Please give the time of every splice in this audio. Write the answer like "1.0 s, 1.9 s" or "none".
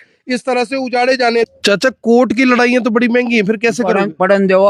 1.5 s